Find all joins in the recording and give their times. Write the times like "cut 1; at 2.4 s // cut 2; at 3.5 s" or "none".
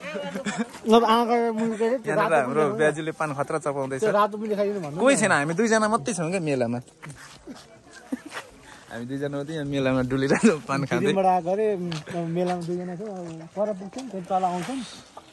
none